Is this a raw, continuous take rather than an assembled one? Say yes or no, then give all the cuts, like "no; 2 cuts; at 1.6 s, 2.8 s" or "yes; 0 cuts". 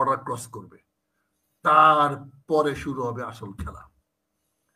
yes; 0 cuts